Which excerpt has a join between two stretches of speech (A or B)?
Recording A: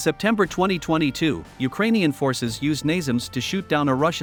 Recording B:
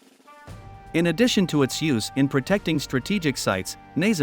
B